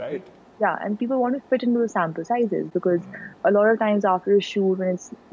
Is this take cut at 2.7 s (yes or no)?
no